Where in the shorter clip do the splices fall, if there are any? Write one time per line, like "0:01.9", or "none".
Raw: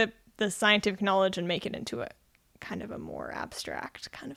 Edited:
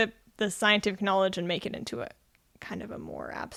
none

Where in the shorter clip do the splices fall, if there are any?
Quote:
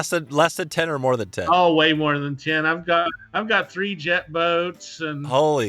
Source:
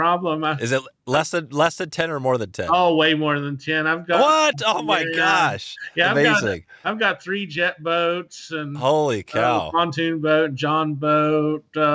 0:03.0

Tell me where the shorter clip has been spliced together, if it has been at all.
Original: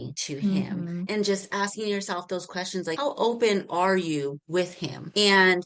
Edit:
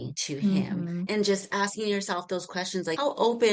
none

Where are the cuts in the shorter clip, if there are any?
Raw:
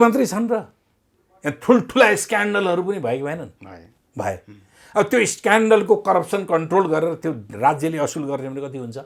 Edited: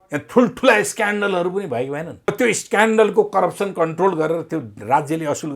0:02.3

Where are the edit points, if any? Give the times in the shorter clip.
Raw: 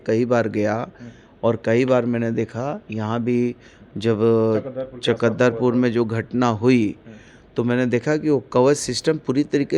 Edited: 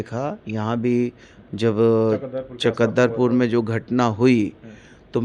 none

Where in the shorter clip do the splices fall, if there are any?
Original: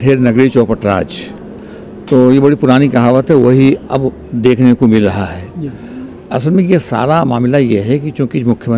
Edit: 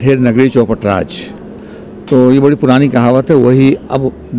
none

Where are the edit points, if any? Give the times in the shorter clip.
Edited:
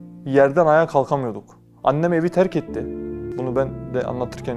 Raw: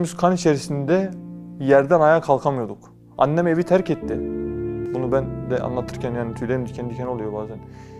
0:03.3

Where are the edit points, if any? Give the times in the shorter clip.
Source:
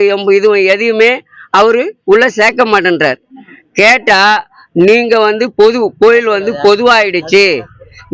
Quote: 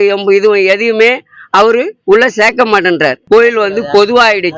0:03.2

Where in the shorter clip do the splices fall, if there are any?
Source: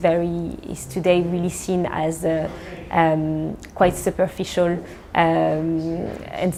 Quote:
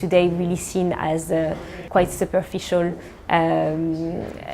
0:01.8

